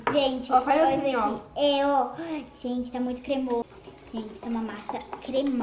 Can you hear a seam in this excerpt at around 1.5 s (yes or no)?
no